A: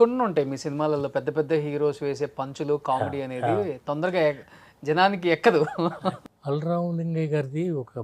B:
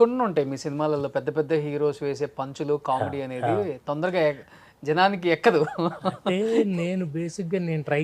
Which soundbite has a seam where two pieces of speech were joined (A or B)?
A